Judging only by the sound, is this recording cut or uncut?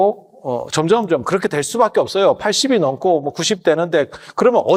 uncut